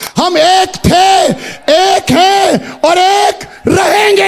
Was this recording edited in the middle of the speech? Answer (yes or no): no